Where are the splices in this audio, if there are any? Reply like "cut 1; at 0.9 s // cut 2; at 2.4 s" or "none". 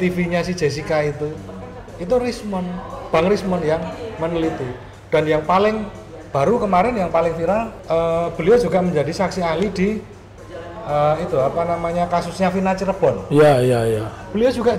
cut 1; at 7.7 s